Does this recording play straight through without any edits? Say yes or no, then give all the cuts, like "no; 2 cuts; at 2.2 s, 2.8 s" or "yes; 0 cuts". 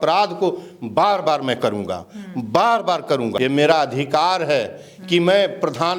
no; 1 cut; at 3.3 s